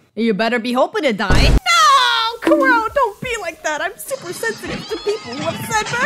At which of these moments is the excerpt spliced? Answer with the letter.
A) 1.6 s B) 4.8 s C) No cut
A